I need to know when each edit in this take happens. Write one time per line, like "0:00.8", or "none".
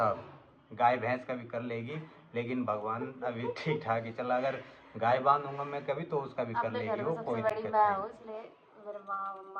none